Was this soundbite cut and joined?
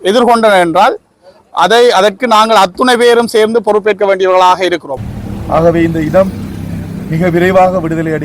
yes; 1 cut; at 4.9 s

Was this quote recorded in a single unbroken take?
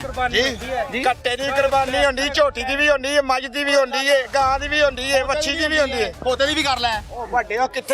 yes; 0 cuts

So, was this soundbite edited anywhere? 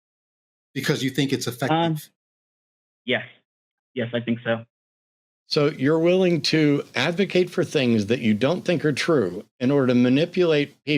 no; 0 cuts

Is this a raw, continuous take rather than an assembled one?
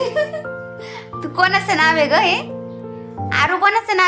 yes; 0 cuts

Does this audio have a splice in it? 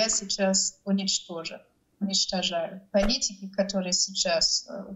yes; 1 cut; at 2.8 s

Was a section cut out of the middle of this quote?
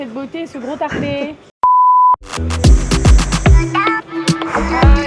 no; 0 cuts

